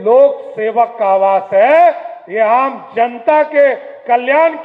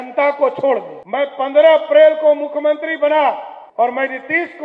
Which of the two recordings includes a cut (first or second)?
second